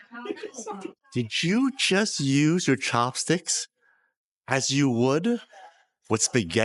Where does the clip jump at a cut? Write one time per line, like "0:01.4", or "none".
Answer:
none